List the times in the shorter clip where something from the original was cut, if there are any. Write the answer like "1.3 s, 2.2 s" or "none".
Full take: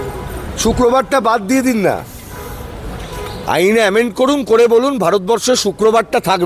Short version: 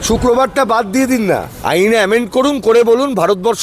1.5 s